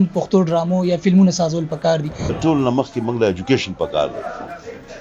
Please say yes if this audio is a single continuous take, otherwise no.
no